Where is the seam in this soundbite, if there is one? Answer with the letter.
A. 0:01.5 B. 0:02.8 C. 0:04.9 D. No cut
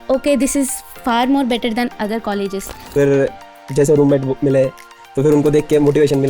B